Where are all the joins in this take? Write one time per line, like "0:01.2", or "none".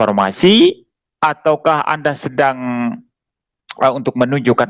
none